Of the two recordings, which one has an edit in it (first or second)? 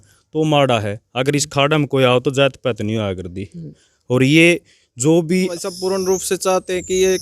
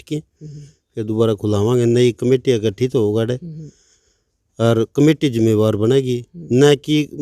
first